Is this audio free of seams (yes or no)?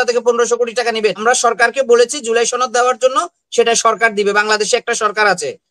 no